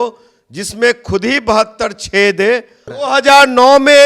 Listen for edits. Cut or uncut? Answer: cut